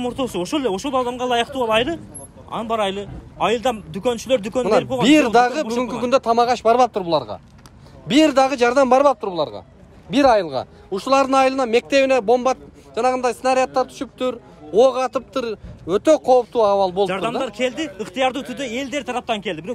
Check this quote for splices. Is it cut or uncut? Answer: uncut